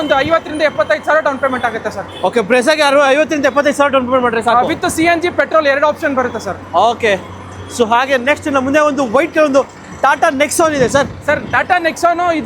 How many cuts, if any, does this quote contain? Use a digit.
0